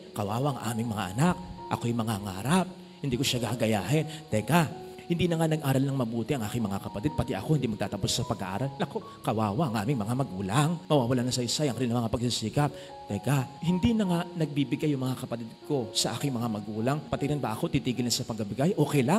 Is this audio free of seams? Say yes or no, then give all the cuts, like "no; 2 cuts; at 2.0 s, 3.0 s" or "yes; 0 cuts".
yes; 0 cuts